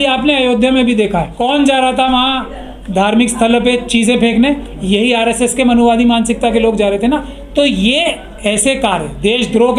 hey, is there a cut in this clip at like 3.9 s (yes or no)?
no